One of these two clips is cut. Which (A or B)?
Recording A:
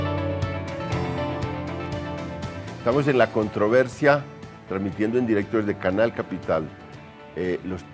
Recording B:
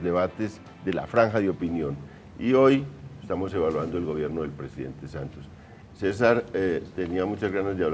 B